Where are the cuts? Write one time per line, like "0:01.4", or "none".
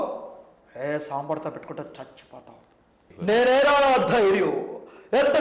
0:03.1